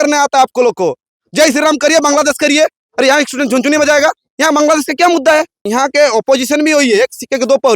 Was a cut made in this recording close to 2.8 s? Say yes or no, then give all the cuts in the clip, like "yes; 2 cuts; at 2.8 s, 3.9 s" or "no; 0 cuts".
no; 2 cuts; at 4.3 s, 5.6 s